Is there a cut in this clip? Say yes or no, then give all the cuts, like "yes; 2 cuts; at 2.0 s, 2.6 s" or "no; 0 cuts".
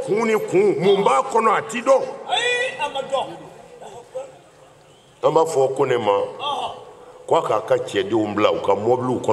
no; 0 cuts